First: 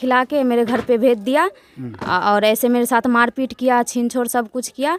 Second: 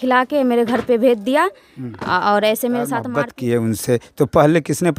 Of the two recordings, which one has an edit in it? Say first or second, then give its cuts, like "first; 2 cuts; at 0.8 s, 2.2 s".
second; 1 cut; at 3.1 s